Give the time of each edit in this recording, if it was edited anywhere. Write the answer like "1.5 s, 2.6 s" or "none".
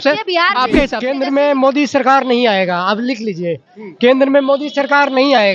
1.0 s

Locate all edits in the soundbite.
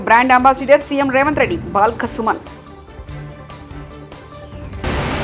none

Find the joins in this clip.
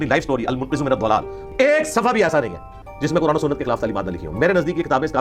1.4 s

